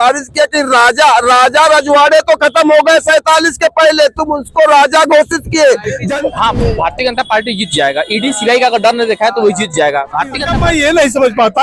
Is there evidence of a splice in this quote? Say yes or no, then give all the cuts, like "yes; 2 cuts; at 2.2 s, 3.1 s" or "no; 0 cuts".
yes; 2 cuts; at 6.0 s, 10.5 s